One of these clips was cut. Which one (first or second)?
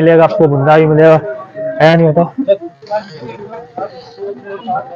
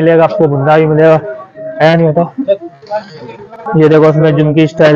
second